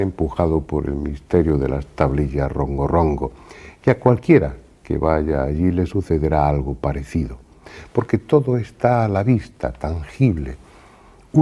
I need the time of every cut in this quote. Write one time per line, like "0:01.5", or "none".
0:05.2